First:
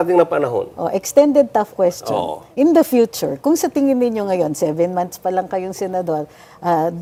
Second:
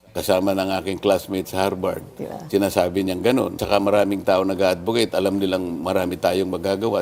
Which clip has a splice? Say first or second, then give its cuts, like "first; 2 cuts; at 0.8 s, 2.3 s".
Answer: second; 1 cut; at 3.6 s